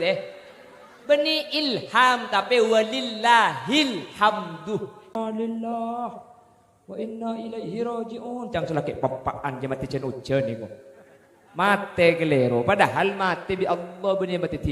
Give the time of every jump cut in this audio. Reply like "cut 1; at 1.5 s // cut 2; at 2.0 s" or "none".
cut 1; at 5.1 s